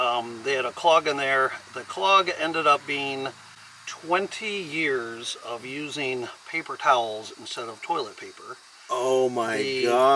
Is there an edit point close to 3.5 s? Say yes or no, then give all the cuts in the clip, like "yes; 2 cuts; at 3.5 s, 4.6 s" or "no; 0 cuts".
no; 0 cuts